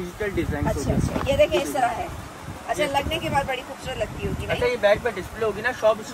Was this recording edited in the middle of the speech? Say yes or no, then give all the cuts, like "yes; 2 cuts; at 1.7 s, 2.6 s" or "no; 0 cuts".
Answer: no; 0 cuts